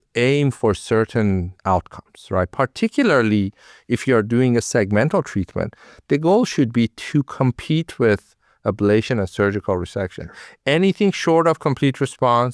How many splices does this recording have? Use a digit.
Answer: 1